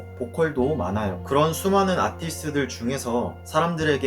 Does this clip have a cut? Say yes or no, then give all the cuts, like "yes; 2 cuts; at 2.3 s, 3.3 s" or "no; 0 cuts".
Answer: yes; 1 cut; at 1.2 s